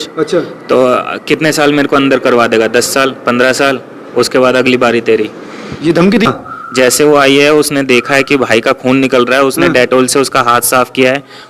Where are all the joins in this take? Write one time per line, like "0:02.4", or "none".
0:06.3